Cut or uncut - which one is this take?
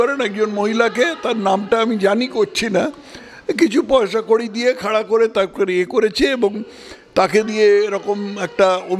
uncut